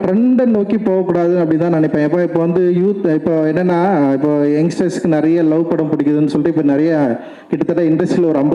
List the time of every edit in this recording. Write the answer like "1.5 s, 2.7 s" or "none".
none